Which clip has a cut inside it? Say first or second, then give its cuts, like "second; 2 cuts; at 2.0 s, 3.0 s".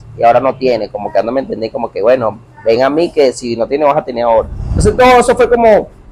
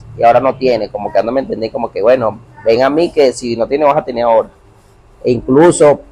first; 1 cut; at 4.8 s